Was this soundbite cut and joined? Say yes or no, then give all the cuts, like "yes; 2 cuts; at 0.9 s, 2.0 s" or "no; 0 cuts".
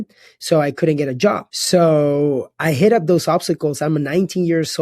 yes; 1 cut; at 1.5 s